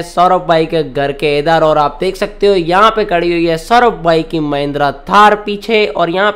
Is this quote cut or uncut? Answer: uncut